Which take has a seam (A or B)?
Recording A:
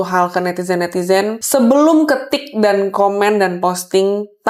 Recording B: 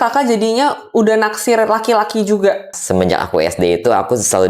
B